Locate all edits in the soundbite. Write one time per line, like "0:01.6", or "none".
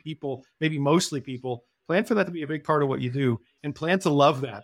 0:03.5